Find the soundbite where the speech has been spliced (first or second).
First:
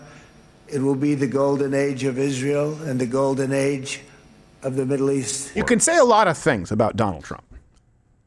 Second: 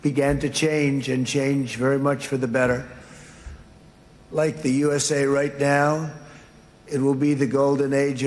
first